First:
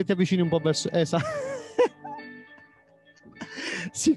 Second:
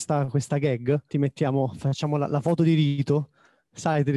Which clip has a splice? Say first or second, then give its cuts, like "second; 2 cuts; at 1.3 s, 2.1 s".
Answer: second; 1 cut; at 1.1 s